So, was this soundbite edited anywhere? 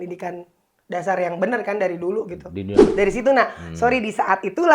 yes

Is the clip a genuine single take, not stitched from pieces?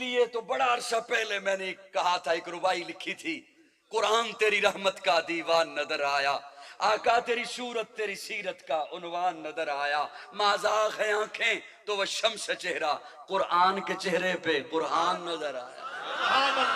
yes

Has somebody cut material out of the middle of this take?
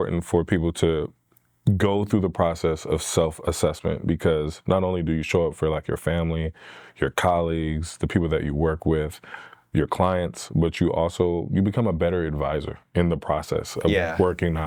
no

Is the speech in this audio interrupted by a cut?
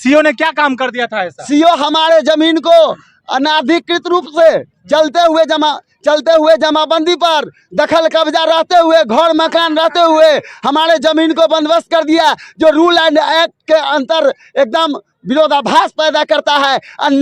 no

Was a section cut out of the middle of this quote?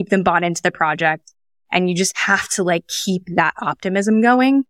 no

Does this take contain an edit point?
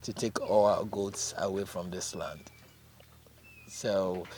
no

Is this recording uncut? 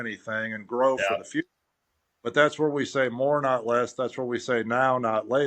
yes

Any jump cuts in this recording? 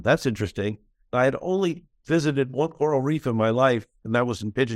yes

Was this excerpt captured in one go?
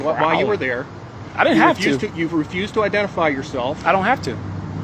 yes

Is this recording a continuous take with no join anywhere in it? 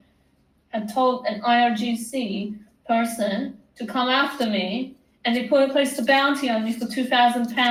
yes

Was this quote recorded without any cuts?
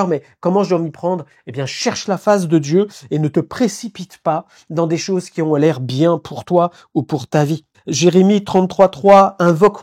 yes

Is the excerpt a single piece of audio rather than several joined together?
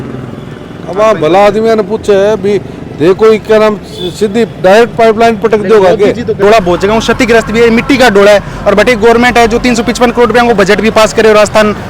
no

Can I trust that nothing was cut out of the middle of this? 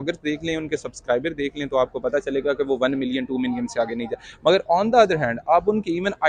yes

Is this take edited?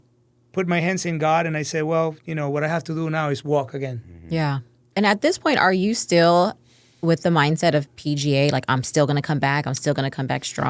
yes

